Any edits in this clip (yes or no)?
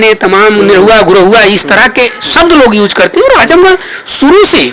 no